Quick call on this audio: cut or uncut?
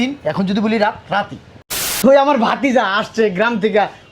cut